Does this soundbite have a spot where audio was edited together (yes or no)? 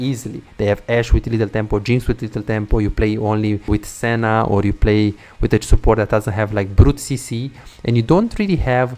yes